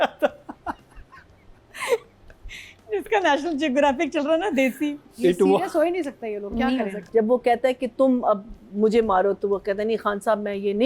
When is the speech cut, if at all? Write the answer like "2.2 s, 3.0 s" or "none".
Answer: 7.0 s